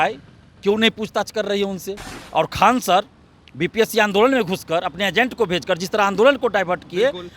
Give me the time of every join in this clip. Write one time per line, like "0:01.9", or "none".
0:02.2